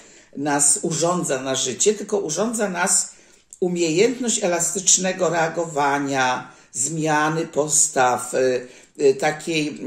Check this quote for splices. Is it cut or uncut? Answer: uncut